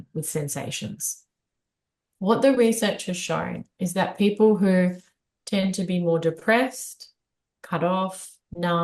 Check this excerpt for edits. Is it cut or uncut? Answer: uncut